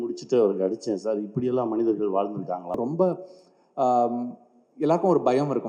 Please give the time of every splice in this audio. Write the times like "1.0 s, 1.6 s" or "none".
2.8 s